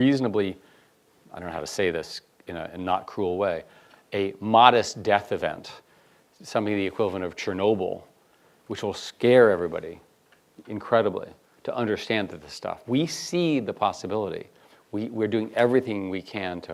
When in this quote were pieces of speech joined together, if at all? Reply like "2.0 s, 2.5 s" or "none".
none